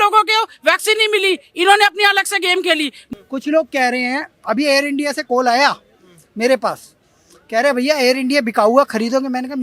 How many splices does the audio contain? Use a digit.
1